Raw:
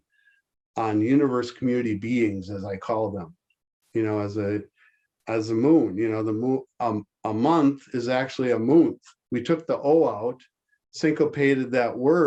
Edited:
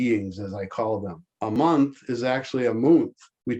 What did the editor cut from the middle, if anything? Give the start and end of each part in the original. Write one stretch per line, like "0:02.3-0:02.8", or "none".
0:03.6-0:07.4